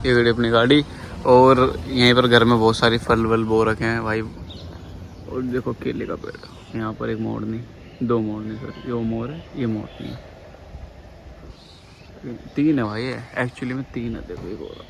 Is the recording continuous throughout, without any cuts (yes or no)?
yes